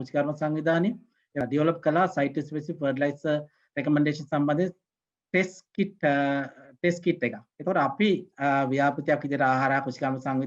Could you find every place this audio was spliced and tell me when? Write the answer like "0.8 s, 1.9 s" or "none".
7.5 s